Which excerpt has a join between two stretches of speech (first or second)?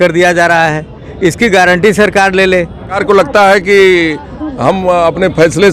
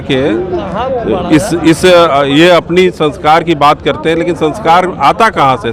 first